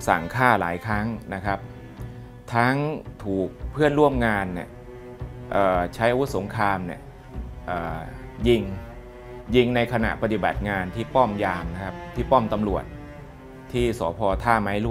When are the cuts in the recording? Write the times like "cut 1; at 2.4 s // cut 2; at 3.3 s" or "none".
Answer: none